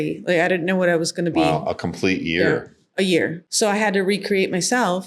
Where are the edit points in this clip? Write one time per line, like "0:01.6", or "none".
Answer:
0:03.4